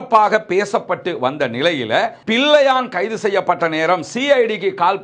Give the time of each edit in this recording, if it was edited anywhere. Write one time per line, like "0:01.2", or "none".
0:02.2

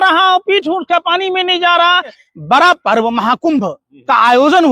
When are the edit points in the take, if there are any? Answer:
0:02.2

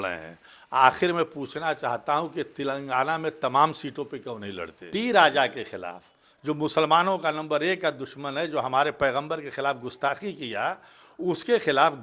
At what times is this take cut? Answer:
0:04.8

